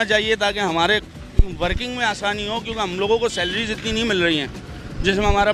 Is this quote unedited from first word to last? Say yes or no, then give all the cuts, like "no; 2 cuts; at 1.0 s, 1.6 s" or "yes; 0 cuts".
yes; 0 cuts